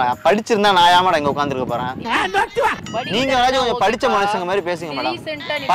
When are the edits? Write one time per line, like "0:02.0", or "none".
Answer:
none